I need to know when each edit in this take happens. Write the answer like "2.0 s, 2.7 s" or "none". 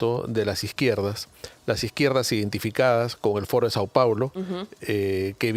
none